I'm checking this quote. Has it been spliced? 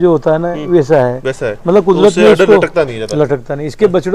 no; 0 cuts

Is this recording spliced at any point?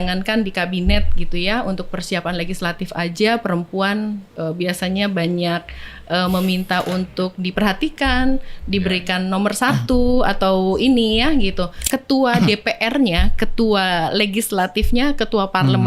yes; 1 cut; at 11.8 s

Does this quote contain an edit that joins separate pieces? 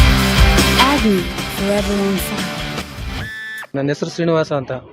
yes; 1 cut; at 3.6 s

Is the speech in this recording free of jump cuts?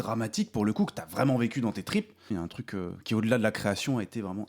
no; 1 cut; at 2.3 s

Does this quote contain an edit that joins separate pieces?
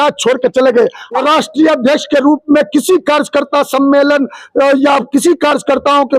yes; 1 cut; at 1.2 s

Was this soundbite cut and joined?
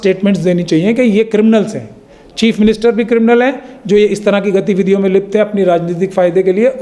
no; 0 cuts

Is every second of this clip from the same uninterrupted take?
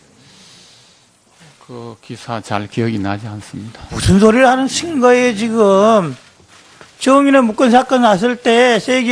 no; 1 cut; at 7.2 s

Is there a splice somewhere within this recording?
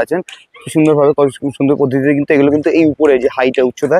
no; 0 cuts

